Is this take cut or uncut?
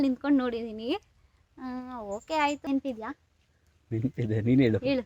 cut